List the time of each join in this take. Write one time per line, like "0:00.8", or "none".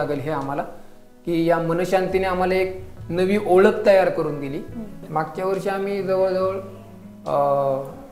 0:05.0